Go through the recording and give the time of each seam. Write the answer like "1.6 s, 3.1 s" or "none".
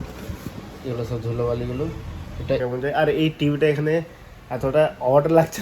2.6 s